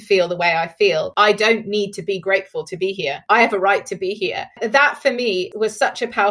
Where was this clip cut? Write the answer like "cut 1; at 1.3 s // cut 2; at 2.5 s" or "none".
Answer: cut 1; at 1.1 s // cut 2; at 3.1 s // cut 3; at 4.6 s // cut 4; at 5.5 s